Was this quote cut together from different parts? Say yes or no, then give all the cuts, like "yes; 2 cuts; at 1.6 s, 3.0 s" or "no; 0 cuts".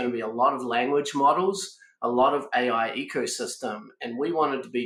no; 0 cuts